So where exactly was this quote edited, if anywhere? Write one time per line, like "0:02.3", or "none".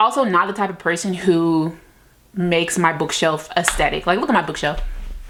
none